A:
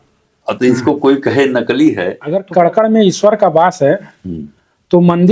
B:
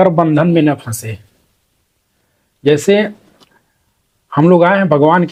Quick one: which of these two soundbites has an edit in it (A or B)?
A